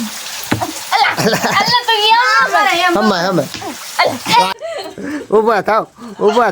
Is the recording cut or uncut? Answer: cut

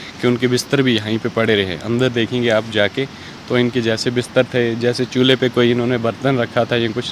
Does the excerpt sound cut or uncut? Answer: uncut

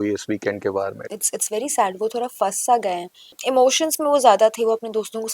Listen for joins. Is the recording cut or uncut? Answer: cut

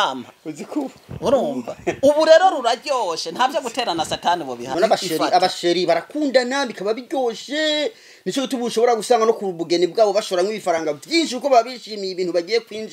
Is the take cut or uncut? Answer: cut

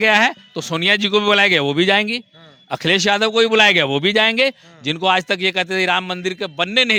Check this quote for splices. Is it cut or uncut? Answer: uncut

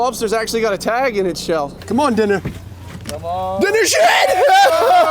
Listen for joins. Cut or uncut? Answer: cut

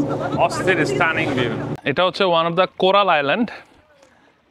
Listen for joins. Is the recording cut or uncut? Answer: cut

